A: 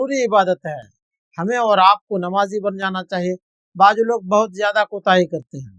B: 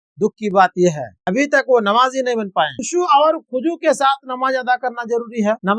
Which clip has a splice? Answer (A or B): B